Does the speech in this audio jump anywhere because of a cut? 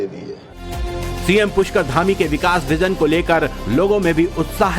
yes; 1 cut; at 3.6 s

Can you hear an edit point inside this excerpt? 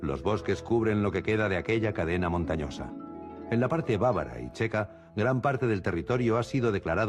yes; 1 cut; at 3.2 s

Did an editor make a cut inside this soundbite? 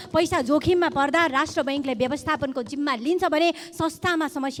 no; 0 cuts

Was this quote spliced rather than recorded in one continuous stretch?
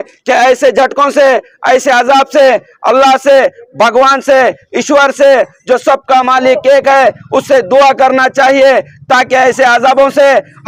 no; 0 cuts

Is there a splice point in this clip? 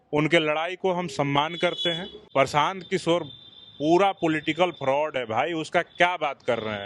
yes; 1 cut; at 2.1 s

